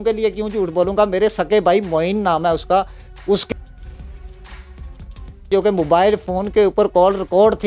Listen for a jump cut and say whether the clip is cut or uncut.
uncut